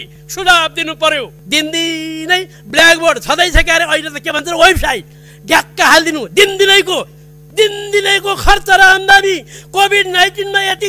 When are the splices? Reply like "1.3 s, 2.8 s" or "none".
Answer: 1.4 s